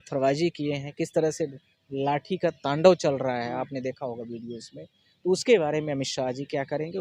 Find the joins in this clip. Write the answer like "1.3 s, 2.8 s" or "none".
none